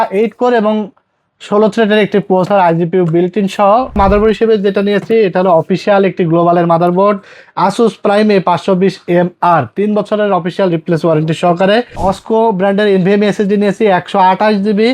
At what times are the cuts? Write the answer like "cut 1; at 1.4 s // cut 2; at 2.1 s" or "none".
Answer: cut 1; at 4.0 s // cut 2; at 11.9 s